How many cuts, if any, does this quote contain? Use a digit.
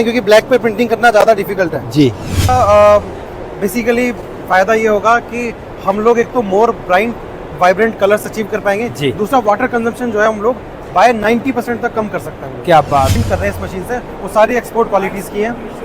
2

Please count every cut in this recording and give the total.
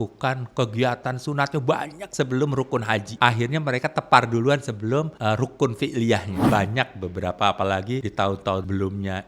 4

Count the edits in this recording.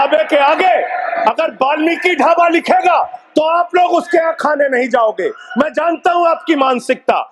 0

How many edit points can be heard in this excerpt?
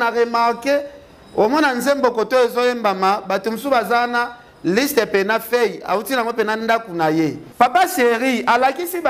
1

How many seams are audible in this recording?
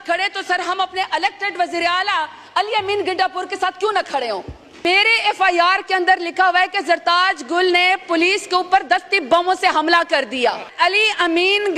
2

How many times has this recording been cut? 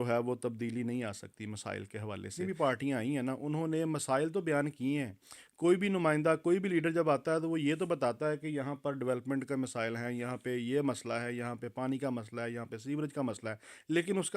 1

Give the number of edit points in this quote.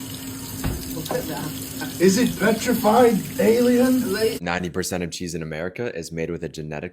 1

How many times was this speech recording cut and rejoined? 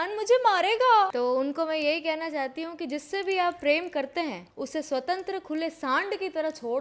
2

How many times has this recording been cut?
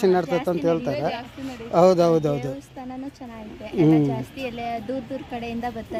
0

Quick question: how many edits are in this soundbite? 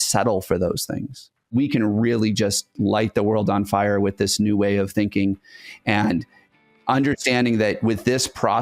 1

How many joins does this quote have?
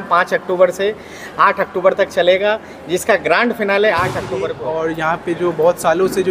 1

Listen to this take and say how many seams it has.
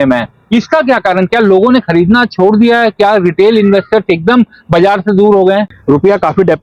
1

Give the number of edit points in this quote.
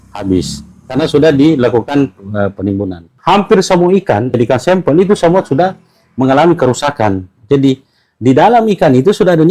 1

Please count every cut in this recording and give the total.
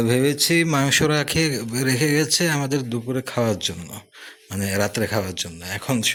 0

